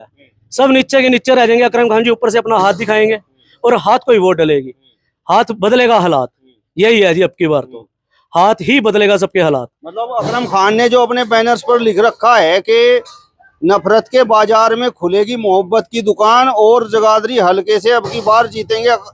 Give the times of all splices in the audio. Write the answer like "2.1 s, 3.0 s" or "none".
none